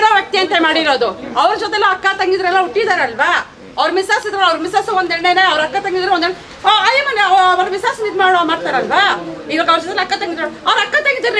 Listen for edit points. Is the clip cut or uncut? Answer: uncut